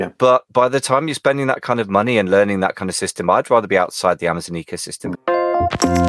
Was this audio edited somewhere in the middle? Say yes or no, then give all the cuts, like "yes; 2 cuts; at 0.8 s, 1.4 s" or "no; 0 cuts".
yes; 1 cut; at 5.2 s